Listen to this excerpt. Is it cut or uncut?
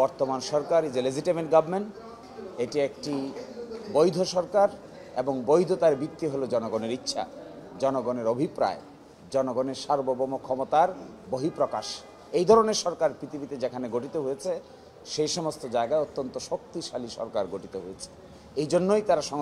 uncut